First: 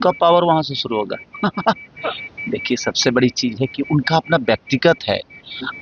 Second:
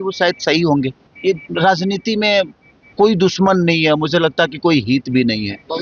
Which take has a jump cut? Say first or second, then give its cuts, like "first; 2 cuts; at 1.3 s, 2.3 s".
second; 1 cut; at 1.0 s